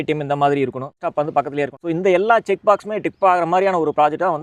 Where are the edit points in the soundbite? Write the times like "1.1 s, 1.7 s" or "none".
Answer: 1.3 s